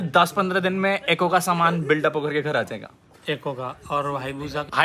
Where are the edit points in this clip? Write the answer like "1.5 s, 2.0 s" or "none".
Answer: none